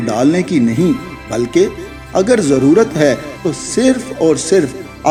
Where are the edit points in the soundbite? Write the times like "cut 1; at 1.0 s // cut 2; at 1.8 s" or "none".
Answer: none